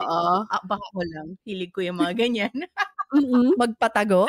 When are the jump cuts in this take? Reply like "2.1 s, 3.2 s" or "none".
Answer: none